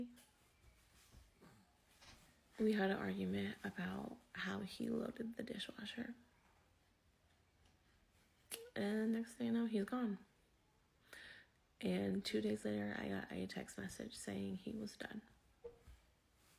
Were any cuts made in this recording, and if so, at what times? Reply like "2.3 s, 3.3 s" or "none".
7.0 s